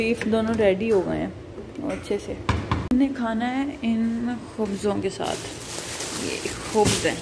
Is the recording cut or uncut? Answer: cut